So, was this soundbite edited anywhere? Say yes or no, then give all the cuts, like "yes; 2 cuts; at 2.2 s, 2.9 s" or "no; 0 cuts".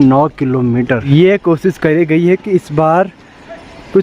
yes; 1 cut; at 1.0 s